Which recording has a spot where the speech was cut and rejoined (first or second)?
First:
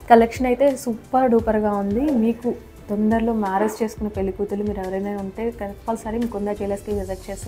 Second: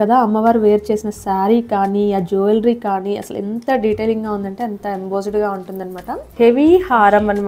second